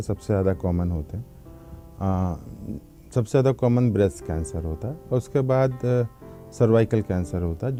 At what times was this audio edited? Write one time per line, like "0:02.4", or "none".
none